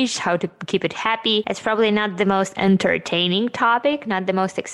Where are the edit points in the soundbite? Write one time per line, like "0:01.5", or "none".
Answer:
0:01.5